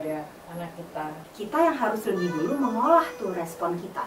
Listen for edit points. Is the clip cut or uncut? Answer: cut